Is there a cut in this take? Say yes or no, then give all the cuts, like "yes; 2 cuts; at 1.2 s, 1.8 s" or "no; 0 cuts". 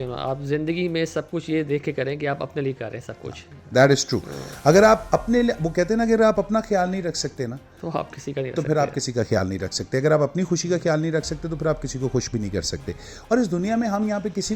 no; 0 cuts